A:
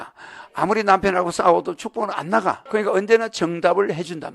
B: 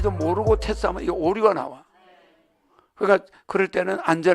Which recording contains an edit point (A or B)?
A